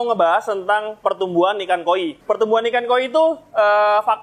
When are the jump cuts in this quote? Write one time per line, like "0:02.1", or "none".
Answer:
0:02.1

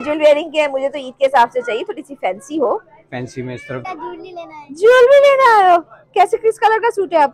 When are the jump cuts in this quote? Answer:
0:03.8

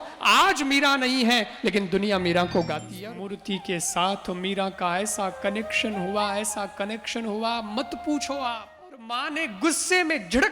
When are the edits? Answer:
0:02.9
0:09.1

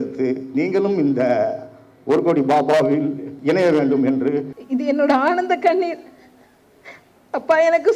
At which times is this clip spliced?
0:04.6

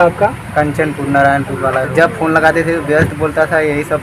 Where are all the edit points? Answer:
0:01.9

